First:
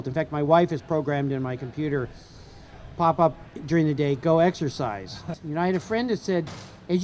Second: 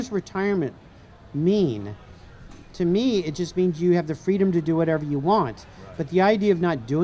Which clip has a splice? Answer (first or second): first